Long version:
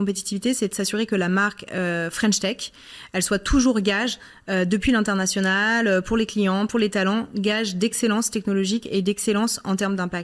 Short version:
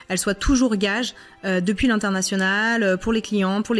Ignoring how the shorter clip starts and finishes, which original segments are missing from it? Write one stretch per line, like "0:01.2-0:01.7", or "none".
none

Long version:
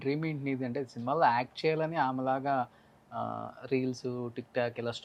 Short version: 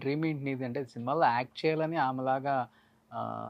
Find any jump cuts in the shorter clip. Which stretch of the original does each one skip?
none

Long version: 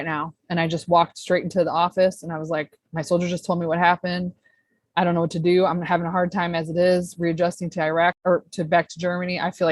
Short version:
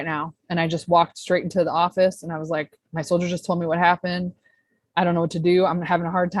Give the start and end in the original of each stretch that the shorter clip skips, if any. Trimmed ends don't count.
none

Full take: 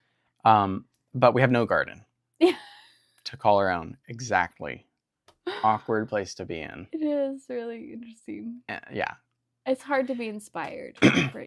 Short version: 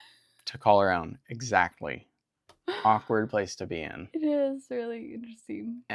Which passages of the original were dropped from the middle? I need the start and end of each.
none

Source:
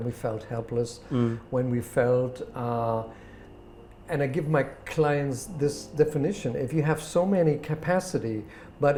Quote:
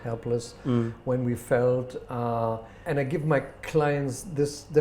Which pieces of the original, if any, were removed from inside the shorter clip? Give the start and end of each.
0:03.2-0:03.9

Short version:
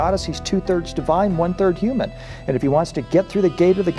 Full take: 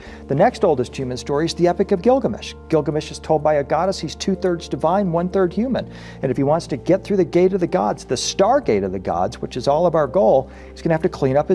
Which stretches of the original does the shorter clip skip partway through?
none

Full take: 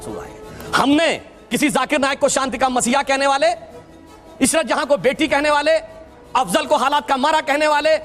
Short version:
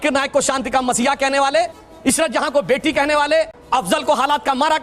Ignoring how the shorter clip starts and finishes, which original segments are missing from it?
0:03.7-0:04.2
0:05.9-0:06.2

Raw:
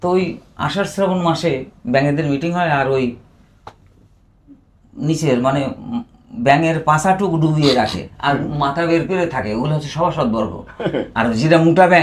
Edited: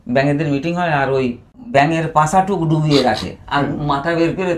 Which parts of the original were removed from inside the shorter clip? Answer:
0:03.3-0:06.2

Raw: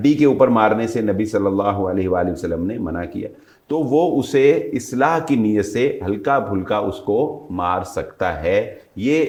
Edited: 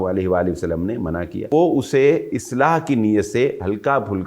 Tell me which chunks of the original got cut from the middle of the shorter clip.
0:03.3-0:03.9

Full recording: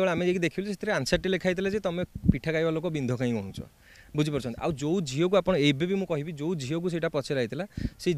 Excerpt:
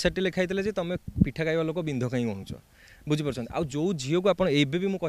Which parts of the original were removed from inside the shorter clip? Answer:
none

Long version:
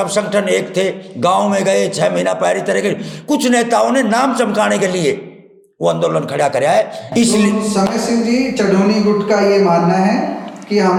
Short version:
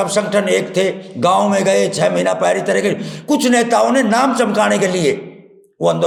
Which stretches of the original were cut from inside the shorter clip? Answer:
none

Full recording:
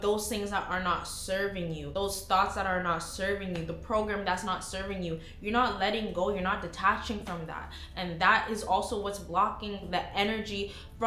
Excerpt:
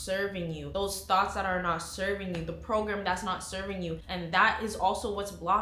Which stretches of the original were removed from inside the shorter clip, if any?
0:05.3-0:07.9

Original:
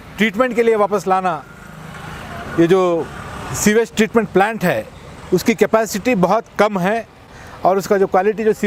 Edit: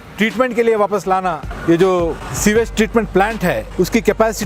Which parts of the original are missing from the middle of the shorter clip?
0:01.5-0:02.4
0:03.2-0:03.5
0:04.9-0:05.2

